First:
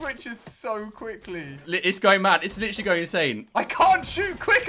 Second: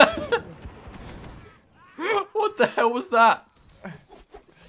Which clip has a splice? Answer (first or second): first